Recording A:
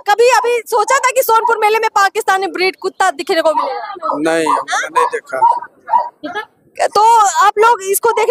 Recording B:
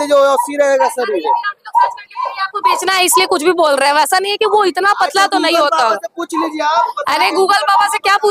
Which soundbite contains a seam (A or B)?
B